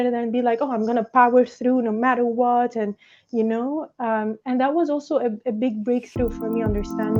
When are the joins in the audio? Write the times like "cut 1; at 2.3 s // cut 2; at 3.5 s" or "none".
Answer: none